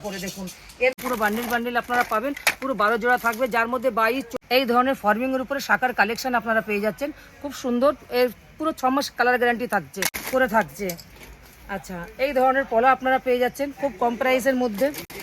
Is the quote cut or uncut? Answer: cut